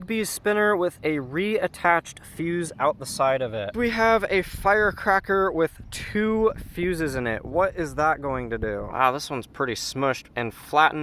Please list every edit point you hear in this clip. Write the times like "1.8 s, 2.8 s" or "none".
3.7 s, 8.9 s

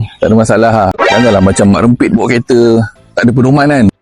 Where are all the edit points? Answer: 1.0 s

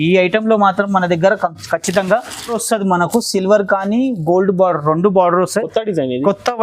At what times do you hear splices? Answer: 2.6 s

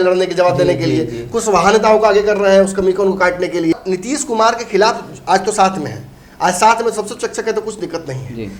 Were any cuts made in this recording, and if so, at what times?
3.7 s

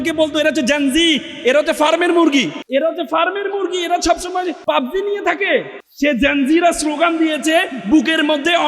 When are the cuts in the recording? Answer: 2.6 s, 4.6 s, 5.8 s

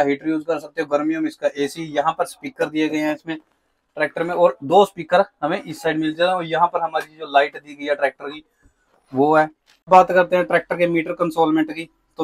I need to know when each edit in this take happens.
none

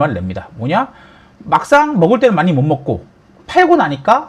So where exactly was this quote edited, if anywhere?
none

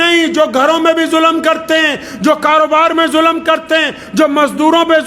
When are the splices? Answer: none

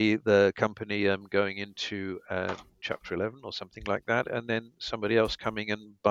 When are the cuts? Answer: none

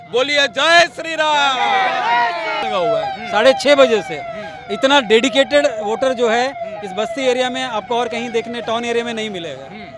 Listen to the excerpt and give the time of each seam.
none

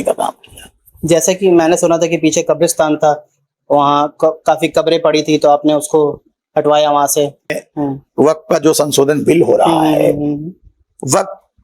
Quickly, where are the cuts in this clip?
7.5 s

